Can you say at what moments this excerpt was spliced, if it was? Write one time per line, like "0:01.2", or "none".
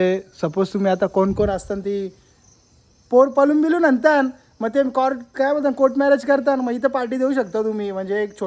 none